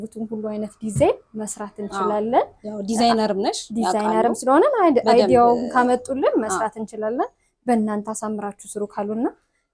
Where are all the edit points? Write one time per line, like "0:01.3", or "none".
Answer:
none

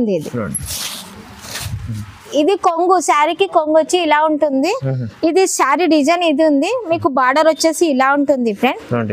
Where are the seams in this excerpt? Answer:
0:02.3

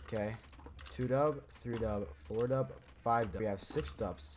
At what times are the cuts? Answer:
0:03.4

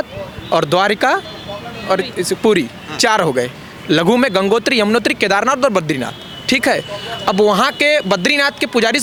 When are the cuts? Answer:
none

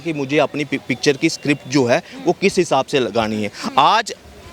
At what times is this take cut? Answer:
none

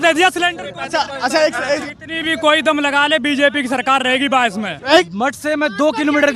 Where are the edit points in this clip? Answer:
0:01.8
0:05.1

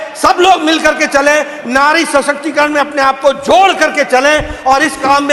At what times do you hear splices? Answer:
none

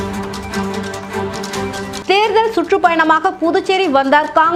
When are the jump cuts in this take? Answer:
none

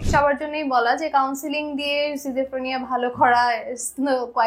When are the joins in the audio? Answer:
none

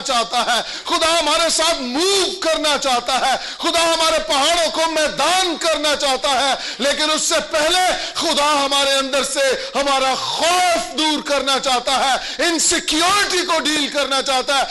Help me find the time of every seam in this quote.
none

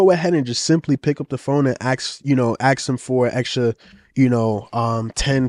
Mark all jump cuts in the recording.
none

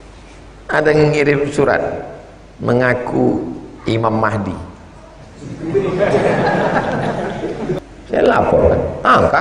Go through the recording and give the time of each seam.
0:07.8

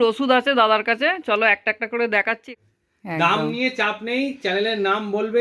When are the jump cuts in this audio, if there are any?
0:02.5

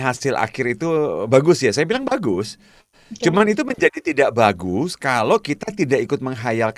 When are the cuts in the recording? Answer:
none

